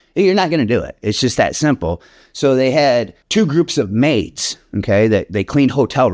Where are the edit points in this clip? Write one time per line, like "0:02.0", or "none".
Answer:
0:03.2